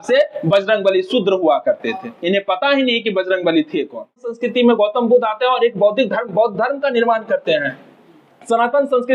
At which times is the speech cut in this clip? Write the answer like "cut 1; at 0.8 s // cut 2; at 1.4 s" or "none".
cut 1; at 4.4 s